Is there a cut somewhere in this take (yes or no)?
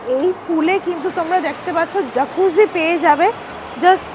no